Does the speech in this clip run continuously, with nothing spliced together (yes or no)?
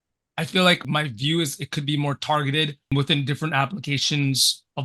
no